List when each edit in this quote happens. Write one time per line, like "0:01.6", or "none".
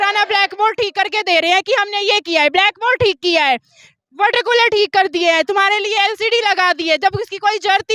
none